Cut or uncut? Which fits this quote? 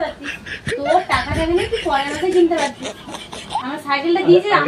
uncut